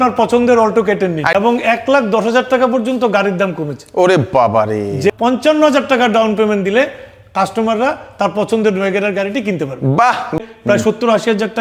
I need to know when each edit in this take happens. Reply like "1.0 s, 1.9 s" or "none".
1.3 s, 5.1 s, 10.4 s